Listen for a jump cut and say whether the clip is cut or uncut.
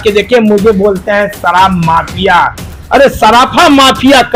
uncut